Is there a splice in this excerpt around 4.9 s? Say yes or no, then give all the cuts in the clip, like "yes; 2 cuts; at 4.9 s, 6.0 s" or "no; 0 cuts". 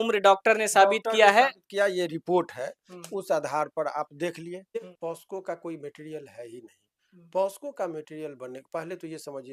yes; 1 cut; at 4.9 s